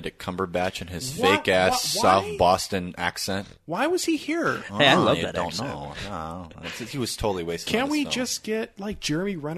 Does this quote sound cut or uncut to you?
uncut